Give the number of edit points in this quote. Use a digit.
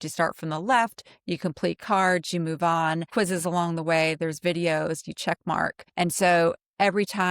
2